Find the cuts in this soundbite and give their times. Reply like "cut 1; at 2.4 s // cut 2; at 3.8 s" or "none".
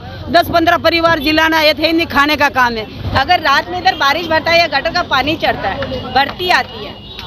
cut 1; at 3.0 s